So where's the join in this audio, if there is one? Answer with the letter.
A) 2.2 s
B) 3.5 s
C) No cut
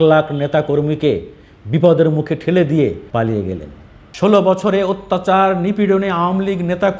B